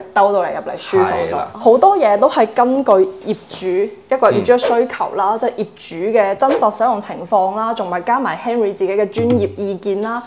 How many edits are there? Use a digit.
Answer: 1